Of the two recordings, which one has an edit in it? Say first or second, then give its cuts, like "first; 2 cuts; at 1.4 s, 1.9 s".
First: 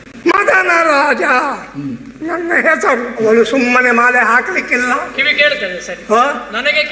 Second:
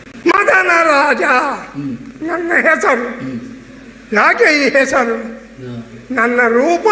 first; 1 cut; at 3.2 s